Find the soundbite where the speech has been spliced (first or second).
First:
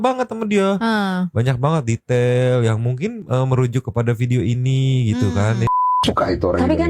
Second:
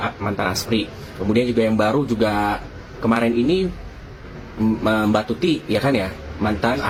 first